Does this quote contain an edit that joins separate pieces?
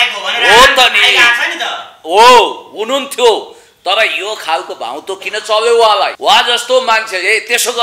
yes; 1 cut; at 6.1 s

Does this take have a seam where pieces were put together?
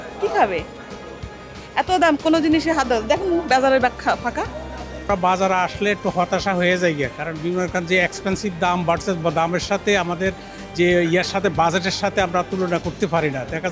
yes; 1 cut; at 5.1 s

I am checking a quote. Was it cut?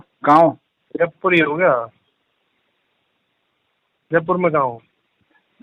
no; 0 cuts

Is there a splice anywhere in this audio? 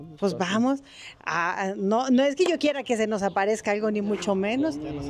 no; 0 cuts

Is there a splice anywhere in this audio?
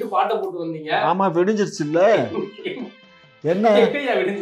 no; 0 cuts

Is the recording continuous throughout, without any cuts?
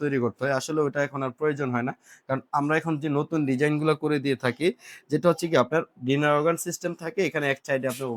yes; 0 cuts

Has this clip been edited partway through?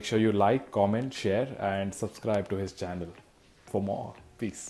no; 0 cuts

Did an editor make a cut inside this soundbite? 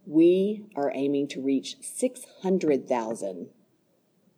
no; 0 cuts

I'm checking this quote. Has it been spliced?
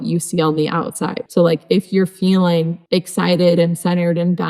yes; 2 cuts; at 1.2 s, 2.8 s

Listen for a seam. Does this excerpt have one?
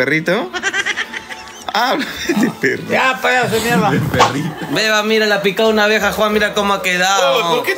yes; 1 cut; at 4.5 s

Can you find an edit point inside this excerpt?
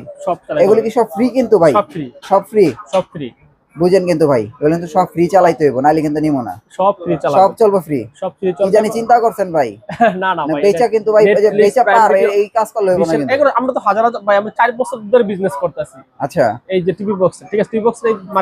no; 0 cuts

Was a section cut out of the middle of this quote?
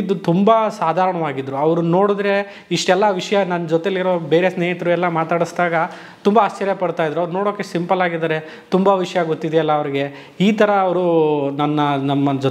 no; 0 cuts

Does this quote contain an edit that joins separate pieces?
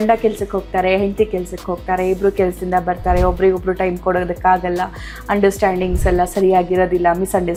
no; 0 cuts

